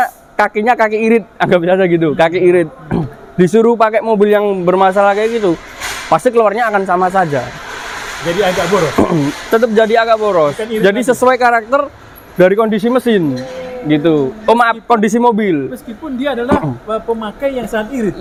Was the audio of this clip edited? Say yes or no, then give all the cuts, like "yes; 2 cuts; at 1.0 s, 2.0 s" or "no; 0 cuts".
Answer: no; 0 cuts